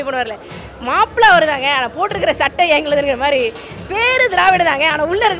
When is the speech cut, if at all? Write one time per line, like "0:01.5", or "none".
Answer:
none